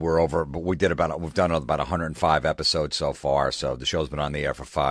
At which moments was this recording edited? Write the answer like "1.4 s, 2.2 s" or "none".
none